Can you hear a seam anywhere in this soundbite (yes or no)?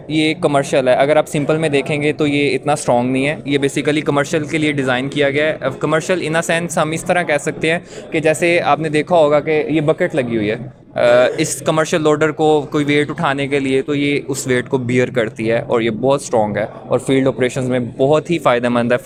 no